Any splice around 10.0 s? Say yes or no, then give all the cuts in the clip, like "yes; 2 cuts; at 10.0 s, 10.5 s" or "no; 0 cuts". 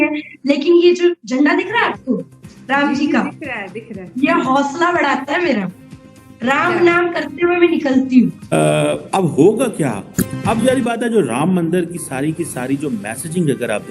no; 1 cut; at 8.6 s